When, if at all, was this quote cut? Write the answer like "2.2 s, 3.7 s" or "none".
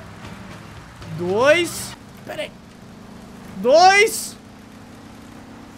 2.0 s